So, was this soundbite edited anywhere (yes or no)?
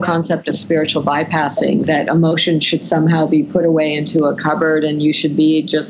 no